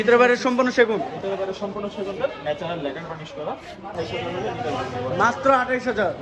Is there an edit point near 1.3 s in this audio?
no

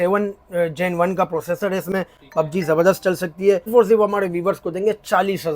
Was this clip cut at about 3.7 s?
yes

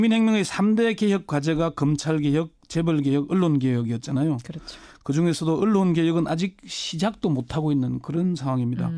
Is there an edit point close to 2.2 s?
yes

